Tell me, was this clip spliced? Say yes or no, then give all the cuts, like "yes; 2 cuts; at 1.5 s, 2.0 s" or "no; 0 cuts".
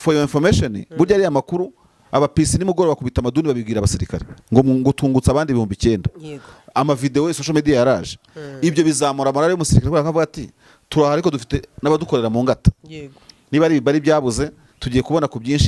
no; 0 cuts